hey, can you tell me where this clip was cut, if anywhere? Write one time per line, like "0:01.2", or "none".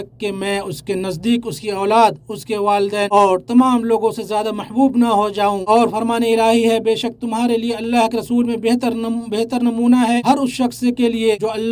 none